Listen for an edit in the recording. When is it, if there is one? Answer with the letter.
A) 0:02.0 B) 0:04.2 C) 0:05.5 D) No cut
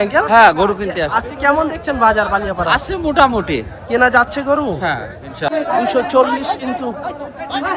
C